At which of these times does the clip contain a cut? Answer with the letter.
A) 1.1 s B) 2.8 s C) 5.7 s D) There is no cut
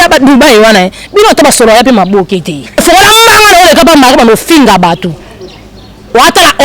B